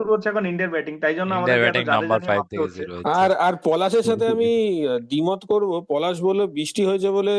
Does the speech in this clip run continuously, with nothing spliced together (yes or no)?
yes